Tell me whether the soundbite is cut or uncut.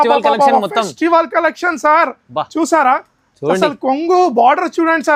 uncut